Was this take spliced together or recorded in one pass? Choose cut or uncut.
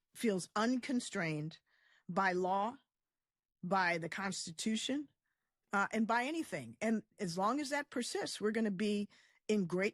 cut